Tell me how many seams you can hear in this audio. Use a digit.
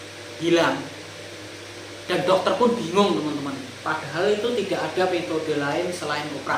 0